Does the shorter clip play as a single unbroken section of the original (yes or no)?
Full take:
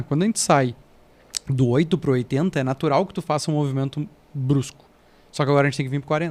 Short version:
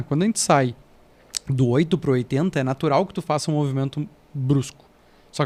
yes